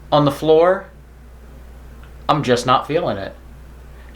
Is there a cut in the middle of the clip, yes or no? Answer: no